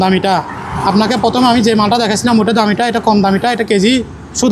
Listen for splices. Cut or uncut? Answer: uncut